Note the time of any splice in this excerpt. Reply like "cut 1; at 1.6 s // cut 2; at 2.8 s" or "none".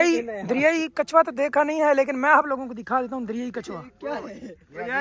cut 1; at 3.9 s